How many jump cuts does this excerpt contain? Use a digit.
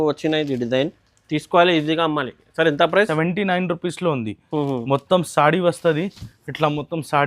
1